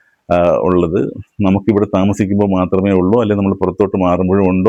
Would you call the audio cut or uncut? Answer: uncut